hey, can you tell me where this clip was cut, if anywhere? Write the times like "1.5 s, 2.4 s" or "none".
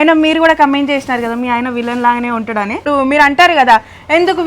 2.9 s